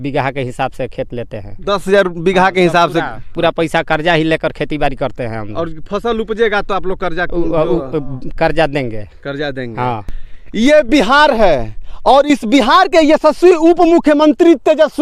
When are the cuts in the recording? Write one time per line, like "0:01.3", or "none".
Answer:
none